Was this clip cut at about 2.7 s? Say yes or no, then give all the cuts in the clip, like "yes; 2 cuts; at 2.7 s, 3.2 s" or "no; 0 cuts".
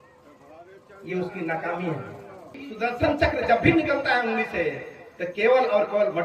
yes; 1 cut; at 2.7 s